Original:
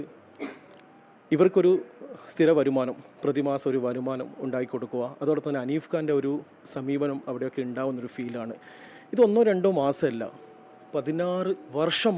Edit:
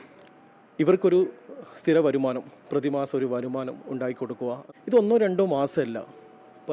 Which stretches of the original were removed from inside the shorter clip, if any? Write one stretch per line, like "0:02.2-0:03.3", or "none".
0:05.2-0:08.9

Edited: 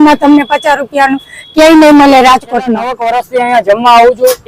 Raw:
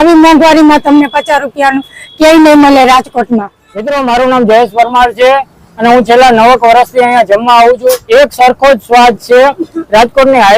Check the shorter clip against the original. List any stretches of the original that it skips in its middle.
0:03.6-0:06.6

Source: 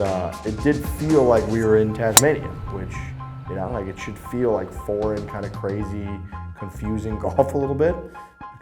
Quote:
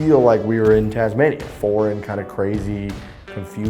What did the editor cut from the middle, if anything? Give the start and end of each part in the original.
0:02.5-0:04.7

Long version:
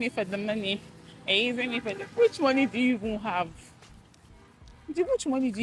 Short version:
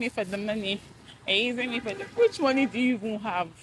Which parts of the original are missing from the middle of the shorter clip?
none

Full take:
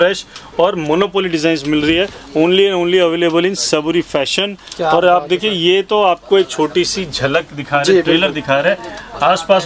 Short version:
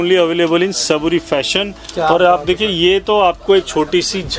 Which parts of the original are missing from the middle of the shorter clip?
none

